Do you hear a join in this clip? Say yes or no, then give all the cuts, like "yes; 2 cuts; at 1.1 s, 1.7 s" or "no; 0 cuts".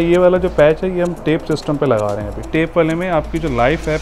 yes; 1 cut; at 2.5 s